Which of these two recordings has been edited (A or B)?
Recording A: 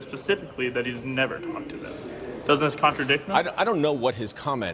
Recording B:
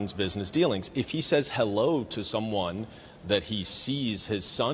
B